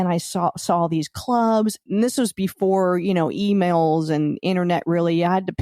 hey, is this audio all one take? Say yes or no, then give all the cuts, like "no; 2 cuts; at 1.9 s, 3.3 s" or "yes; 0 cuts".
no; 1 cut; at 1.8 s